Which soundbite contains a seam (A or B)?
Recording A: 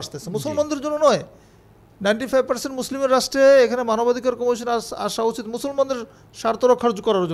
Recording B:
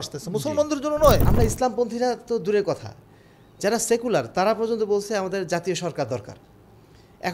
B